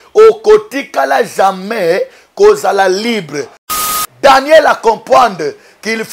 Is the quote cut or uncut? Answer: cut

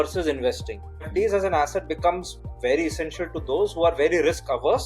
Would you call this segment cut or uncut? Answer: cut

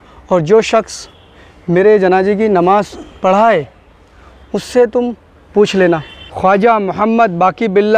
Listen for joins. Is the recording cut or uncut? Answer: cut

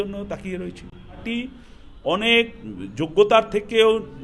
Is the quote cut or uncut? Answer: cut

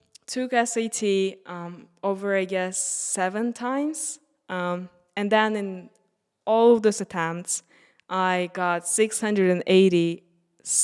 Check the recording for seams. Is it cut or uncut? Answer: uncut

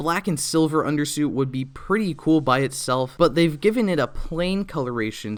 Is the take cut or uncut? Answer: uncut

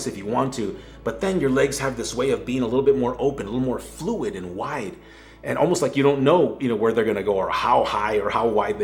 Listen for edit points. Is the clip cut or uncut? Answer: uncut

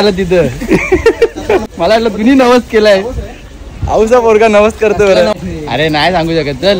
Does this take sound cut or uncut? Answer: cut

